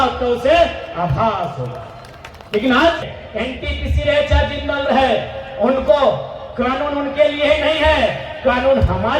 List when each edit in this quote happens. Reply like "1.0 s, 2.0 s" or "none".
3.2 s